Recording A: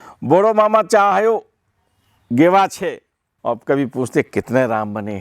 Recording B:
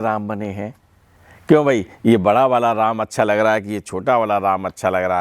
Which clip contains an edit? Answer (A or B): A